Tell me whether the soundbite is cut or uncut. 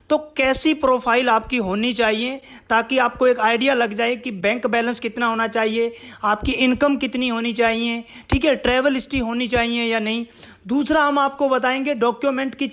uncut